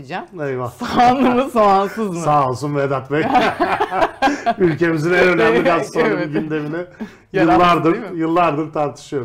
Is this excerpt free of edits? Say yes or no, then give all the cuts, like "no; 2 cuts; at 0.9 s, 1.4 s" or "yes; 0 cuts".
yes; 0 cuts